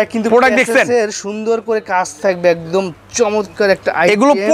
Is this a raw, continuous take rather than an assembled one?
yes; 0 cuts

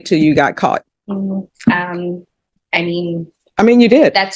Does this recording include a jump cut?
yes; 1 cut; at 0.9 s

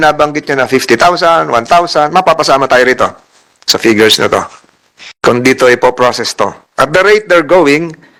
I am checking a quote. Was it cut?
no; 0 cuts

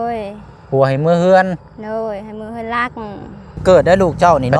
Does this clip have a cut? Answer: yes; 1 cut; at 3.6 s

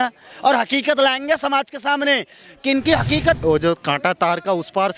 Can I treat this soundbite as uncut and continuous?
no; 1 cut; at 3.4 s

